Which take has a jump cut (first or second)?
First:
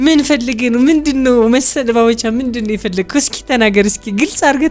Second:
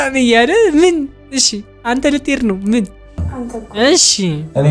second